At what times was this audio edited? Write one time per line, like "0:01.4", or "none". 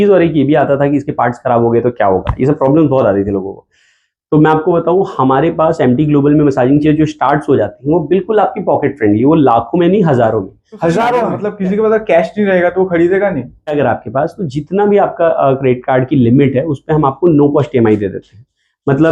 0:11.4
0:13.7